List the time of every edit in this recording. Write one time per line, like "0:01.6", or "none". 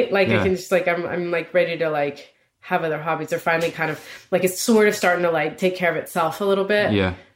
none